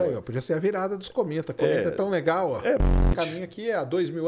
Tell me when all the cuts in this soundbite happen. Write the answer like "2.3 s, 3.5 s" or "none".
2.8 s